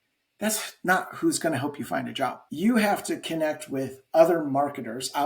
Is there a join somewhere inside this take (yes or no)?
yes